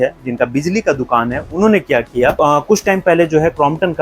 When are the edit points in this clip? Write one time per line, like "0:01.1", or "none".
0:02.4